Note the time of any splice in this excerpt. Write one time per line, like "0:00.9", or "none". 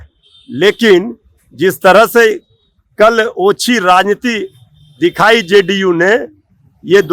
none